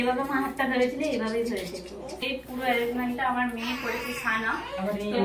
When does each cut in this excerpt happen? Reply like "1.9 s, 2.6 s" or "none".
2.2 s